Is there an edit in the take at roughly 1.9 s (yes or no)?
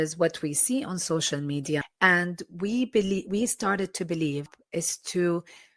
yes